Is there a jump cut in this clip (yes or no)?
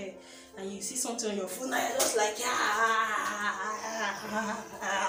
no